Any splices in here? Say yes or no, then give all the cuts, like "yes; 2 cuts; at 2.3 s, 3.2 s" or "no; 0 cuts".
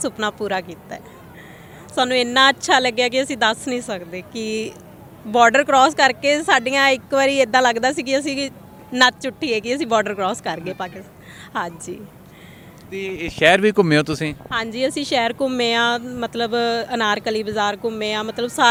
no; 0 cuts